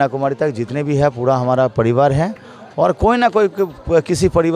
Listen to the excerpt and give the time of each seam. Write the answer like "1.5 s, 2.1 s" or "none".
none